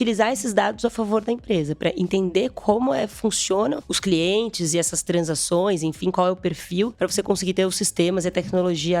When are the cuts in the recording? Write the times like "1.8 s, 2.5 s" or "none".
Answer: 3.9 s, 6.9 s

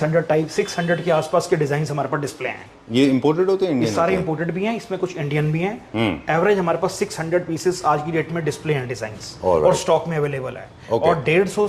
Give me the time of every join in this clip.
none

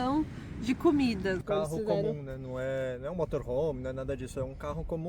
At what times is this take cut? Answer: 1.4 s

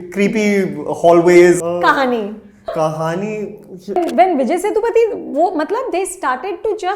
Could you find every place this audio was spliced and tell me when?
1.6 s, 2.7 s, 4.0 s

